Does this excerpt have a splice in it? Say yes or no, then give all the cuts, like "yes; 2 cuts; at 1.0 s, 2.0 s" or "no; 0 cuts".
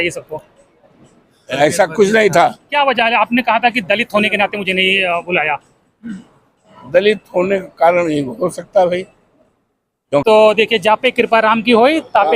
yes; 2 cuts; at 2.6 s, 10.2 s